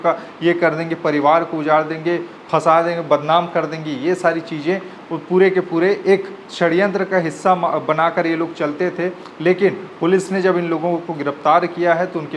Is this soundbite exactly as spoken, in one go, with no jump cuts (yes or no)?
yes